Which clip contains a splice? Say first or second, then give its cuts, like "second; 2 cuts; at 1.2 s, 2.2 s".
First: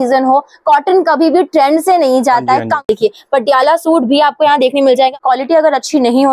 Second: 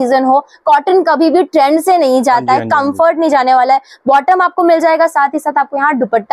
first; 2 cuts; at 2.9 s, 5.1 s